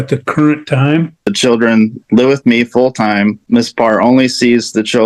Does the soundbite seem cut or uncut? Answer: cut